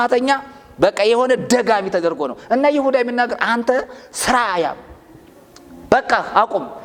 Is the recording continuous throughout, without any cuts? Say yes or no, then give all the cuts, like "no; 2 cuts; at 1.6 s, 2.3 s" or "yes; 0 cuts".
yes; 0 cuts